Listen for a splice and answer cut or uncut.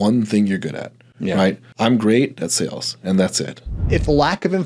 cut